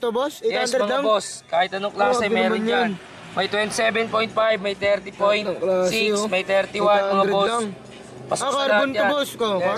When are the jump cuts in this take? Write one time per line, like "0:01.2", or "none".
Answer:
none